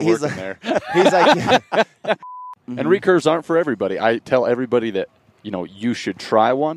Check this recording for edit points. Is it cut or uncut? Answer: cut